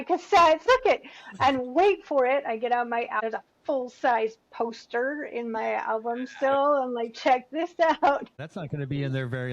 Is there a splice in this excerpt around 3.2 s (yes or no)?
yes